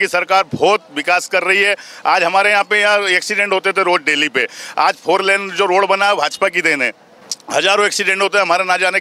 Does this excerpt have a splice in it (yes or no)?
no